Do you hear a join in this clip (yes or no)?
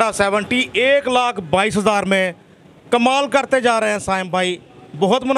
no